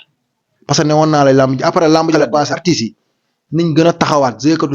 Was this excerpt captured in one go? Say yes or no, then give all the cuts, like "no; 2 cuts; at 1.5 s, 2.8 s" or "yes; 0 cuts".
no; 1 cut; at 2.2 s